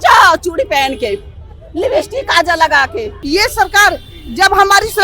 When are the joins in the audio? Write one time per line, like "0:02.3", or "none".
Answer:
0:03.1